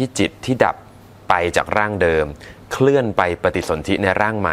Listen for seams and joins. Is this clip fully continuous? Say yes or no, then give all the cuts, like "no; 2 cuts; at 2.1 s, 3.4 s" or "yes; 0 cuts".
yes; 0 cuts